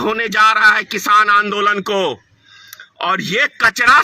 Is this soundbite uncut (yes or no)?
yes